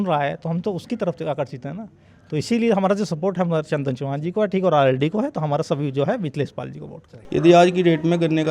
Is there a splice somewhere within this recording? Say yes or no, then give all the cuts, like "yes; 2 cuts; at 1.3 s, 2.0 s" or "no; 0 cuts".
yes; 1 cut; at 7.1 s